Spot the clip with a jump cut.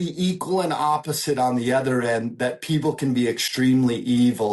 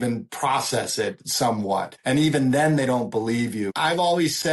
second; 2 cuts; at 1.9 s, 3.7 s

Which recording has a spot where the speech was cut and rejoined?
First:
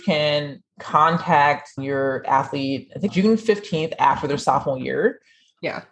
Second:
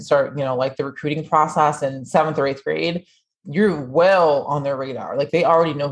first; 1 cut; at 1.7 s

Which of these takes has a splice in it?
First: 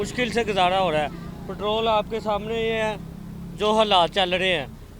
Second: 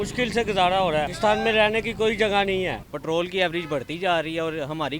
second; 2 cuts; at 1.1 s, 2.9 s

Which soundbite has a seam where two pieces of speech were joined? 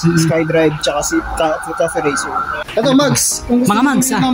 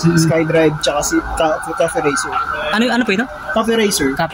first; 1 cut; at 2.6 s

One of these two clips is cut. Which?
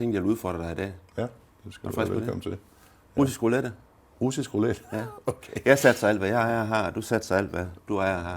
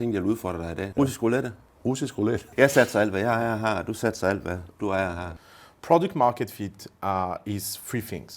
second; 3 cuts; at 0.9 s, 1.8 s, 5.3 s

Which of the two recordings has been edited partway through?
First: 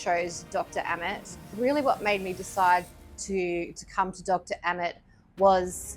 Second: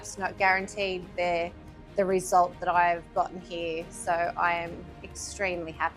first; 1 cut; at 1.5 s

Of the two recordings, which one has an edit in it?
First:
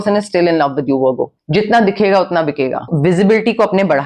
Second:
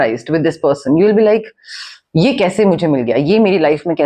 first; 2 cuts; at 1.3 s, 2.9 s

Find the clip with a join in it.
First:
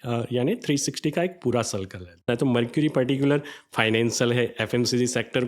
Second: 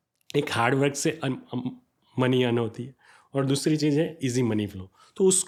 first; 1 cut; at 2.2 s

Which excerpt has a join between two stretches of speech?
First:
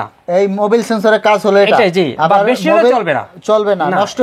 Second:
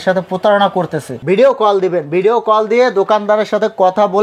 second; 1 cut; at 1.0 s

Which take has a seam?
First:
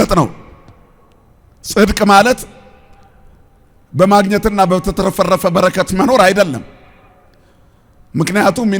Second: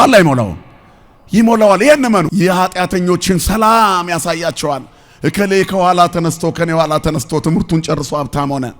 second; 1 cut; at 2.3 s

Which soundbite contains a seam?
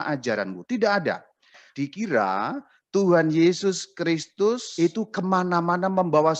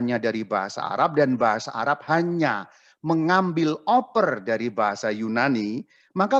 first; 1 cut; at 1.6 s

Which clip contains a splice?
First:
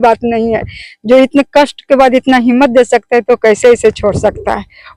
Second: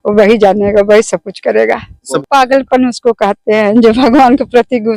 second; 1 cut; at 2.1 s

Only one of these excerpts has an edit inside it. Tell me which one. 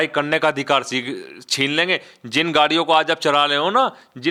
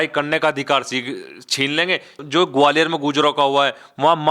second; 1 cut; at 2.2 s

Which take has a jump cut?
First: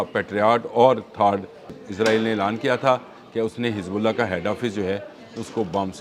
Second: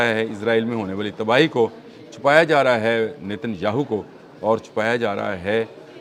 first; 1 cut; at 1.8 s

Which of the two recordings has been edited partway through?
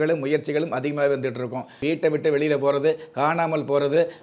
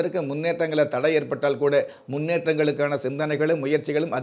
first; 1 cut; at 1.8 s

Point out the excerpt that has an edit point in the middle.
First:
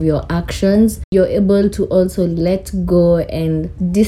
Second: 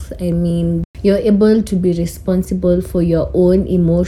first; 1 cut; at 1.0 s

